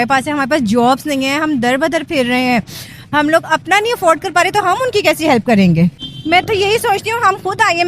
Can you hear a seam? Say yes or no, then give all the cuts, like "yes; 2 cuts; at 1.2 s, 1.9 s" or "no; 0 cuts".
yes; 1 cut; at 6.1 s